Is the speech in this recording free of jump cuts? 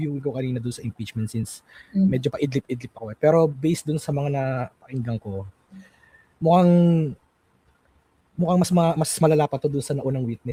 yes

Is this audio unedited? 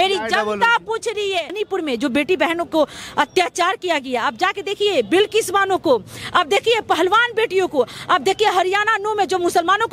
no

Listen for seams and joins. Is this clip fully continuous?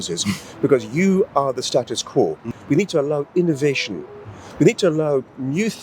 no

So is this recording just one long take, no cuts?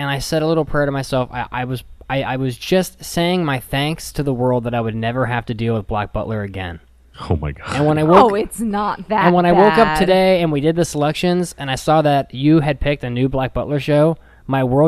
yes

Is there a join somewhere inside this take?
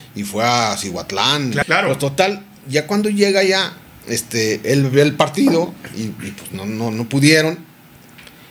yes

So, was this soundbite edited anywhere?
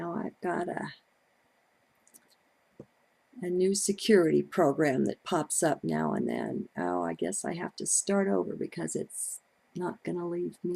yes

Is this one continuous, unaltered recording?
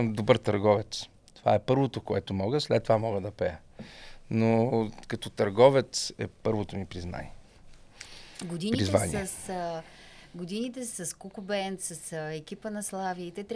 yes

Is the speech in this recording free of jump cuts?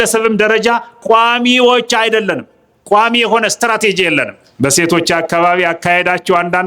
no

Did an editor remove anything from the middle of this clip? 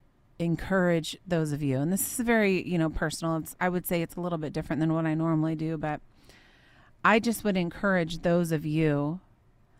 no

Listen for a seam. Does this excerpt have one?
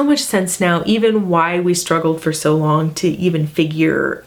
no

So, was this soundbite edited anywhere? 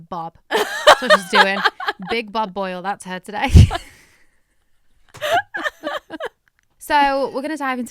no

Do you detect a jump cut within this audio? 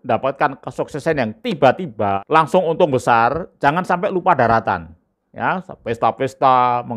yes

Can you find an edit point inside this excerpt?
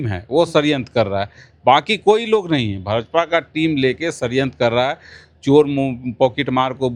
no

